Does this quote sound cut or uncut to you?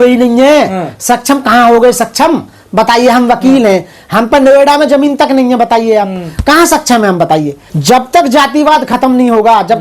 cut